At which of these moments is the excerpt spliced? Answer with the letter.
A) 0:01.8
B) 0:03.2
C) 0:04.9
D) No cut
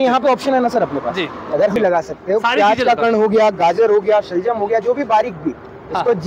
A